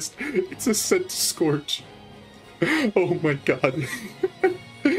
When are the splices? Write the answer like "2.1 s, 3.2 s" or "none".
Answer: none